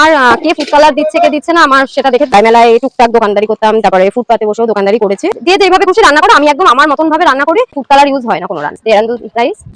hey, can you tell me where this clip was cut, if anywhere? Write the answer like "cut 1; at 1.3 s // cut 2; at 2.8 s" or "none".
cut 1; at 2.3 s // cut 2; at 5.3 s // cut 3; at 7.8 s